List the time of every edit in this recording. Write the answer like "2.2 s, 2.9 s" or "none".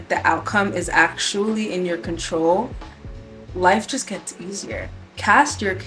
none